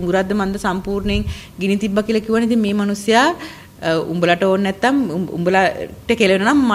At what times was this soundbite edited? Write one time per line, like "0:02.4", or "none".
none